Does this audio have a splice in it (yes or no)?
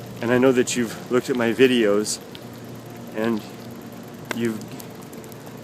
no